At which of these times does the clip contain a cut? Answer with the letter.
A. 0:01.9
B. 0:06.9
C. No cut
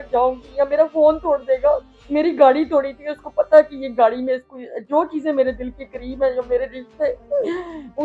C